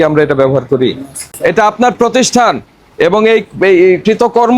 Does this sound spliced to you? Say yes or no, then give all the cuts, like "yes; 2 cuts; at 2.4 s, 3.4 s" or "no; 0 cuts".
yes; 1 cut; at 1.3 s